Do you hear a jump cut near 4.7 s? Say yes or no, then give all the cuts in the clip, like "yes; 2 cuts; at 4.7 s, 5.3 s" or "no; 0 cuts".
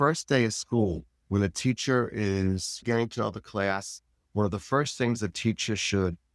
no; 0 cuts